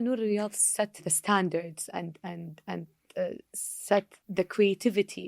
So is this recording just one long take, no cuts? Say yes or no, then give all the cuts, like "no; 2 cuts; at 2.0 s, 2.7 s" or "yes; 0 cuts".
no; 2 cuts; at 1.0 s, 4.2 s